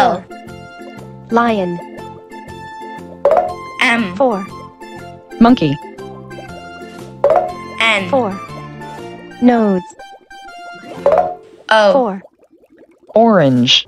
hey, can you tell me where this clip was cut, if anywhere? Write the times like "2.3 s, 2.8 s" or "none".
none